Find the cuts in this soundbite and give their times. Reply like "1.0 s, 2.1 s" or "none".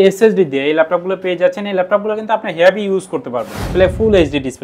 3.6 s